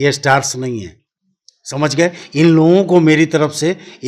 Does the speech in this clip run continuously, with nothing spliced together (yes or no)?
yes